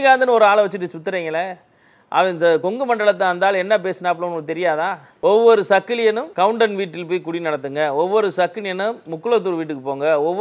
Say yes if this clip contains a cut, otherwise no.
yes